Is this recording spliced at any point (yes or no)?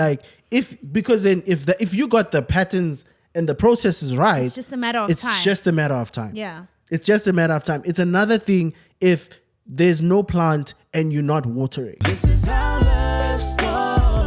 yes